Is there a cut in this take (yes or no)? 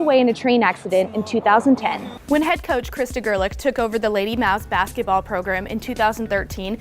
yes